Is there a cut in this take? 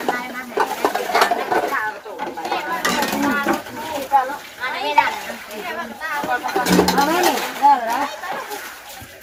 no; 0 cuts

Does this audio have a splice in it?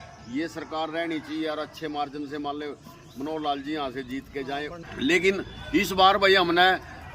yes; 1 cut; at 4.8 s

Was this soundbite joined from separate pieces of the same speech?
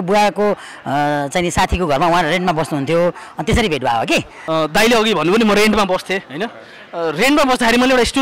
yes; 1 cut; at 4.4 s

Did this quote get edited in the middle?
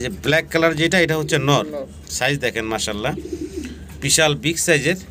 no; 0 cuts

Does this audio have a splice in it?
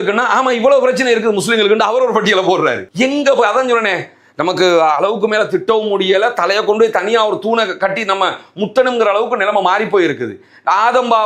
no; 0 cuts

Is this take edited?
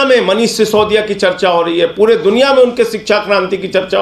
no; 0 cuts

